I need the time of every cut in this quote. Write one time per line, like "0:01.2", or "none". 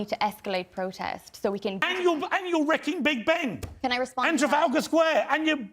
0:01.8